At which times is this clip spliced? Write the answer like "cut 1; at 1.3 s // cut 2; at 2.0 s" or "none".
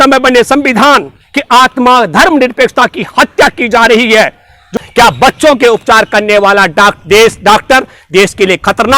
cut 1; at 4.7 s